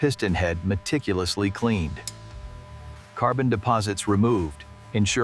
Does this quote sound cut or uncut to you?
uncut